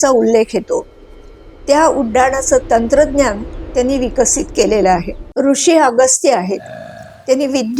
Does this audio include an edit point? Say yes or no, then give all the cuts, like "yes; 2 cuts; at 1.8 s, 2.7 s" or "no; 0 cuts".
yes; 1 cut; at 5.2 s